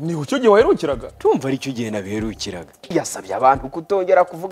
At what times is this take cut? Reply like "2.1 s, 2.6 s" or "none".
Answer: 2.9 s